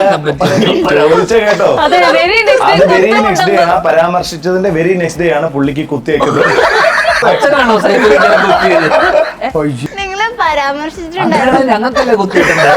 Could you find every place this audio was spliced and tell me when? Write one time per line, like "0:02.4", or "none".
0:07.2
0:09.8